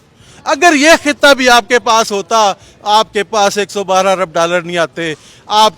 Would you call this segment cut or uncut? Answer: uncut